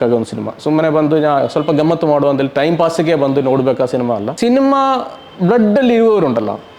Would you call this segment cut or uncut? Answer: cut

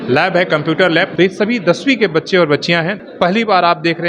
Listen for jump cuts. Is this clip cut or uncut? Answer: cut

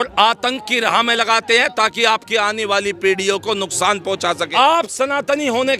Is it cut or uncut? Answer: cut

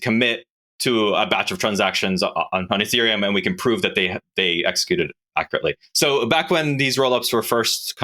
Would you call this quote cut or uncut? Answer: cut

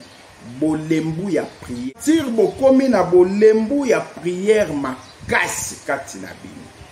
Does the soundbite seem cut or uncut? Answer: cut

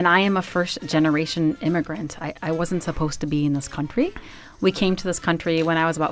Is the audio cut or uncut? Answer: uncut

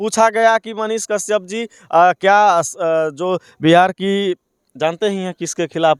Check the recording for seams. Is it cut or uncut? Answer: uncut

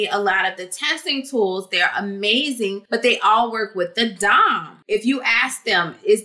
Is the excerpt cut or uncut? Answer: cut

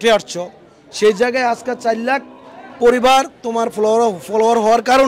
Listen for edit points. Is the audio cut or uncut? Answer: uncut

